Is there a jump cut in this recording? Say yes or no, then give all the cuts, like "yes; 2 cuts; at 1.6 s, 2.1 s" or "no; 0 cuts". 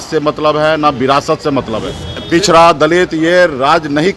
yes; 1 cut; at 2.1 s